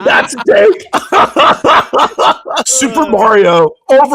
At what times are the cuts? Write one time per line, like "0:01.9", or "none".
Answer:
0:01.0
0:02.7